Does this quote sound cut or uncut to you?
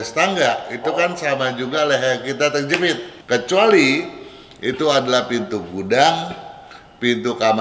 cut